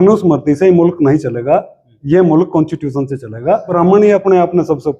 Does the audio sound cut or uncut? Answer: cut